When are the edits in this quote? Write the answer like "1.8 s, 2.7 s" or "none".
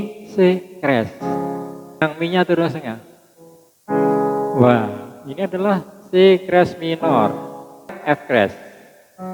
2.0 s, 8.0 s